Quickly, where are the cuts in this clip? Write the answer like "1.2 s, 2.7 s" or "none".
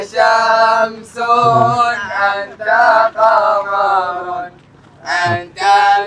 none

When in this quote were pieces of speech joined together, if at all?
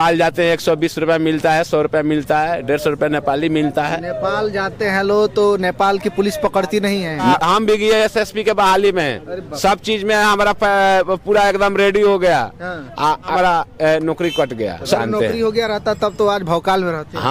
7.4 s, 13.3 s, 14.9 s

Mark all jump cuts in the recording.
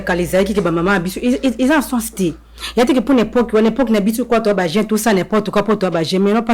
none

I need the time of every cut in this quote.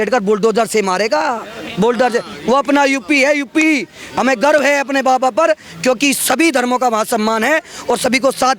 none

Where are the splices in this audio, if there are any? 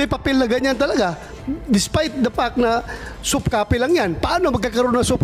none

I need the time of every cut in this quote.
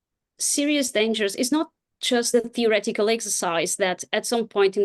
2.3 s

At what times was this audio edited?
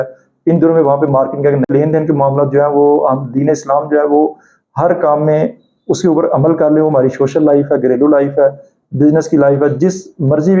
1.7 s

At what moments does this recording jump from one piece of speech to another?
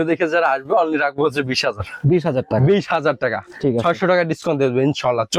none

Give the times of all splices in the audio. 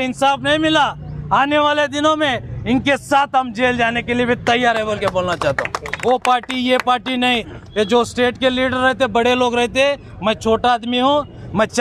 5.9 s

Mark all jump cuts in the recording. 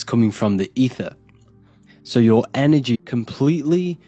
3.0 s

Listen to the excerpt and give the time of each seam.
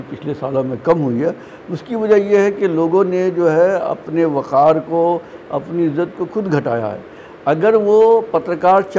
none

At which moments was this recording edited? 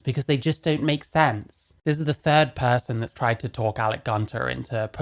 1.8 s

